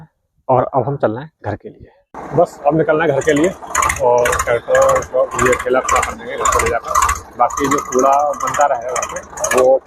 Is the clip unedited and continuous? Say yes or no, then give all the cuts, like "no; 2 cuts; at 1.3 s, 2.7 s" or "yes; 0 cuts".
yes; 0 cuts